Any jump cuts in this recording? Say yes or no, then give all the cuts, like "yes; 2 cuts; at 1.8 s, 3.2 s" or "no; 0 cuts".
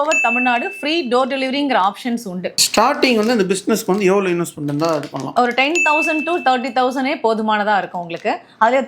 no; 0 cuts